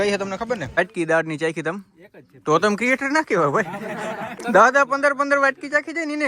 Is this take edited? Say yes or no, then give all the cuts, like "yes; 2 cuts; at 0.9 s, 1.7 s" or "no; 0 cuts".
yes; 2 cuts; at 0.8 s, 4.3 s